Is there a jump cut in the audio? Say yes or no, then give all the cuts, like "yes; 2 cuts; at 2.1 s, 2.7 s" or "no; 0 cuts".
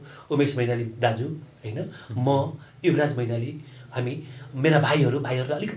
no; 0 cuts